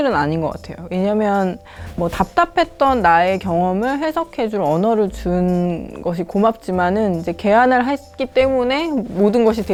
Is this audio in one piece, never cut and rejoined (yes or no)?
yes